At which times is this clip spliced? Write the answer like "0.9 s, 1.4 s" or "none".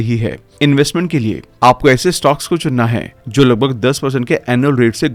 none